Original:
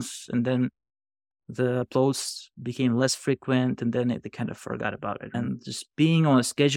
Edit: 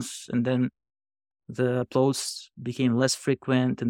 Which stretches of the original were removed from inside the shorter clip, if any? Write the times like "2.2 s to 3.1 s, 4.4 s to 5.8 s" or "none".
none